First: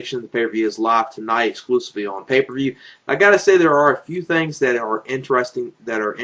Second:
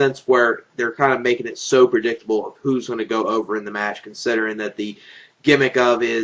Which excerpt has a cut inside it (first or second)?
second